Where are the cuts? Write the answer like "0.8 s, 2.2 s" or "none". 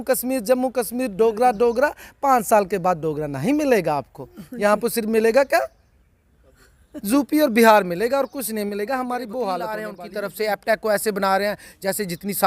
10.0 s